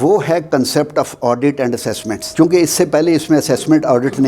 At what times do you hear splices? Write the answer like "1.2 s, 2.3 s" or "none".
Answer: none